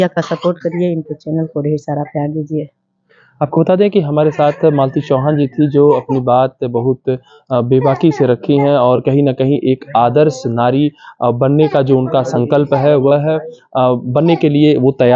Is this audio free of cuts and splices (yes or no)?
yes